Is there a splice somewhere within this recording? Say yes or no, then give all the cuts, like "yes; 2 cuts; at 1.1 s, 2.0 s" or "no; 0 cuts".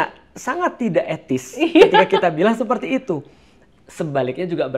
no; 0 cuts